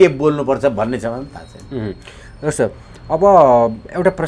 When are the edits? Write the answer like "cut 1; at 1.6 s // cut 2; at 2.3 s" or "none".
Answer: none